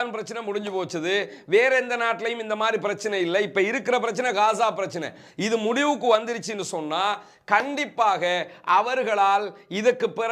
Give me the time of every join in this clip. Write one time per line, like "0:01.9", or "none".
none